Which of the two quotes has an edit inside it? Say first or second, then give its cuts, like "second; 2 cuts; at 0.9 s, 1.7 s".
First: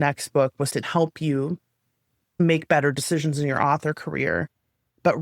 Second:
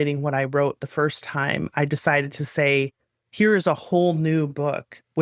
first; 2 cuts; at 0.9 s, 2.4 s